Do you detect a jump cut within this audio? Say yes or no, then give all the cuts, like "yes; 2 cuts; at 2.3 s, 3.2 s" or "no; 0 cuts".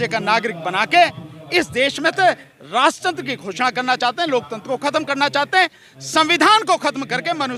no; 0 cuts